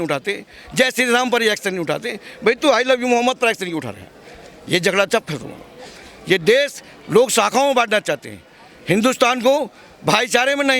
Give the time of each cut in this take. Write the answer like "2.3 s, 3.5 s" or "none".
none